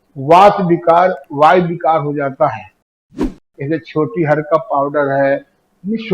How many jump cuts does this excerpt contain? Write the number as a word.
one